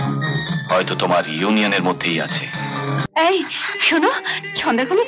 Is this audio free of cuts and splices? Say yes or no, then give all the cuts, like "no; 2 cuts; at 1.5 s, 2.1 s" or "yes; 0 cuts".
no; 1 cut; at 3.1 s